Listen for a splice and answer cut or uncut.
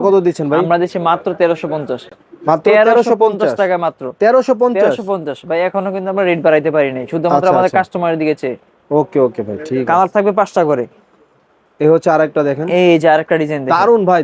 uncut